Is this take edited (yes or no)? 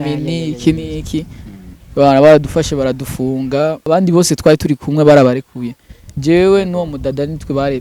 yes